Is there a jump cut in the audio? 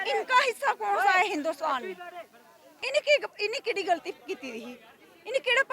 yes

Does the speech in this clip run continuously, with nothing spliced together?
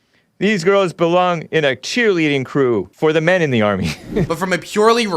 no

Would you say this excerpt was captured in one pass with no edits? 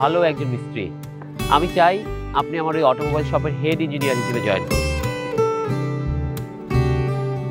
yes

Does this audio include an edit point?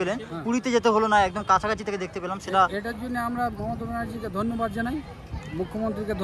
no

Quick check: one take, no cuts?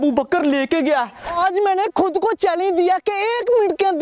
no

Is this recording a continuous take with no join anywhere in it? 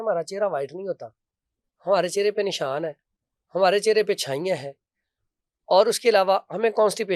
yes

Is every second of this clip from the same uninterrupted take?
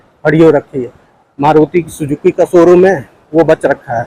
yes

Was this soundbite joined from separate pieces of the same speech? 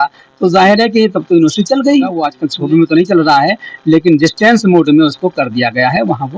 yes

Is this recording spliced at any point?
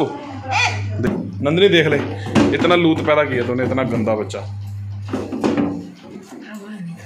yes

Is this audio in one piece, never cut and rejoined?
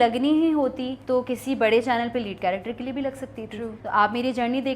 no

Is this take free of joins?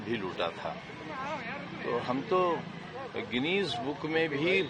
yes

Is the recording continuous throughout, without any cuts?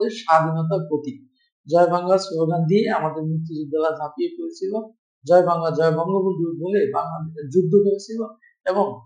yes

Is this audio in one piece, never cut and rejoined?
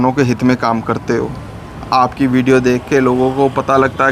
yes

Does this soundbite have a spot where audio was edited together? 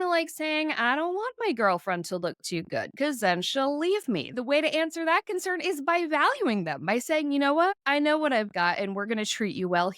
yes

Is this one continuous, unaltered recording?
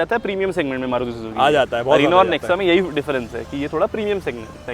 yes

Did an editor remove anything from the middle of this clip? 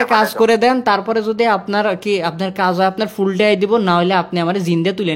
no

